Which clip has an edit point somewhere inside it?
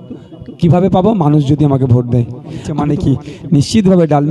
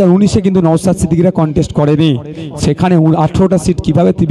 first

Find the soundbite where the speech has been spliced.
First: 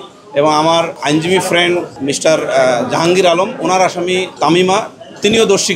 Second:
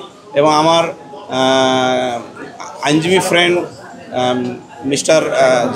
first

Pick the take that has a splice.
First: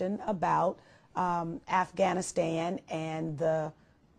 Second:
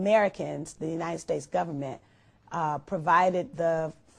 second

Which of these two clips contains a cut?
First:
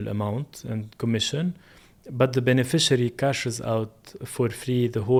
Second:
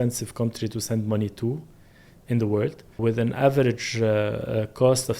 second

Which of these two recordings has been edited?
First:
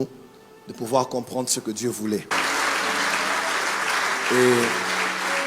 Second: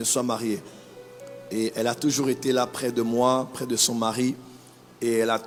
first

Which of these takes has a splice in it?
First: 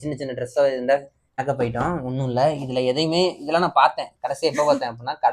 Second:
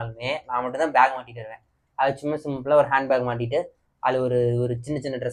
first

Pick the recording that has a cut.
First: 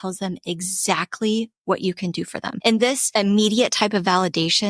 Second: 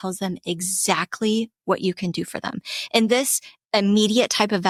first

